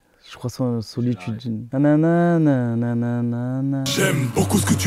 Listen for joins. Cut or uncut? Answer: cut